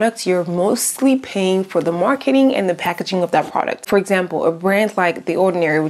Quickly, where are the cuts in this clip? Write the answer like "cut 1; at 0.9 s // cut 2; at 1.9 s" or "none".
cut 1; at 3.9 s